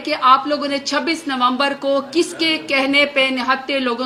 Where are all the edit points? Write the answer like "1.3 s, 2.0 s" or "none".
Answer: none